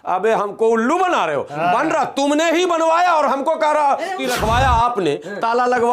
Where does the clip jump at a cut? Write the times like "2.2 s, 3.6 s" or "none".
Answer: 4.2 s